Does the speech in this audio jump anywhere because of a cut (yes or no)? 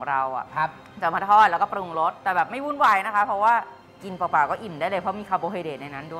no